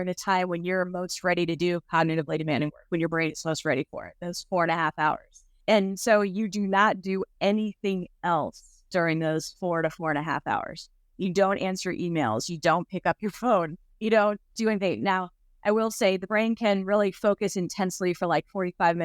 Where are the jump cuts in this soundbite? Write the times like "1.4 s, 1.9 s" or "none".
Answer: none